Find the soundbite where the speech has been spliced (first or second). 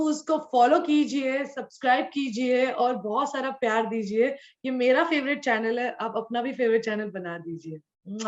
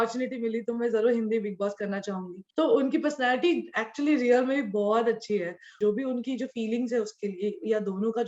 second